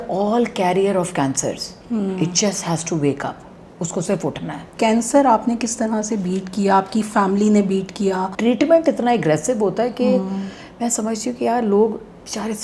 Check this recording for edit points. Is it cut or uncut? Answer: cut